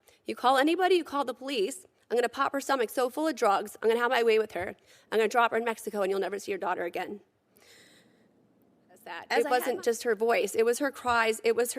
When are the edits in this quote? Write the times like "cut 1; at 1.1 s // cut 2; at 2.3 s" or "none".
cut 1; at 9.2 s